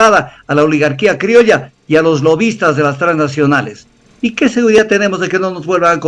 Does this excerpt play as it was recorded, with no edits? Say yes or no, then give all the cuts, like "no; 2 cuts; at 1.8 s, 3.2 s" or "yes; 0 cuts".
yes; 0 cuts